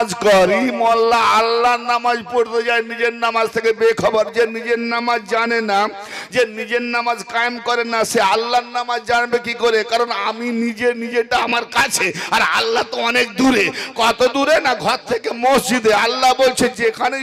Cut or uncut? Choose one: uncut